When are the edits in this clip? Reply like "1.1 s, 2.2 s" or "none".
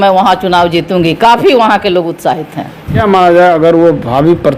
3.0 s